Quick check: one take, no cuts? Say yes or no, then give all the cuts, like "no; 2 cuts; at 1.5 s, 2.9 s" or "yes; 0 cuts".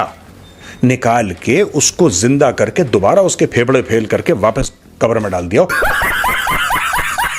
no; 1 cut; at 5.7 s